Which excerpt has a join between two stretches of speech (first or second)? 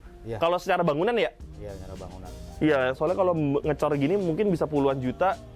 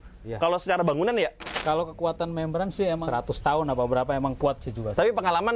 second